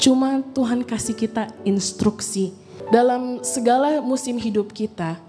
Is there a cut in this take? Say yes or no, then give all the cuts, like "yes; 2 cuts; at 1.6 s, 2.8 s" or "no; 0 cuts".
yes; 1 cut; at 2.7 s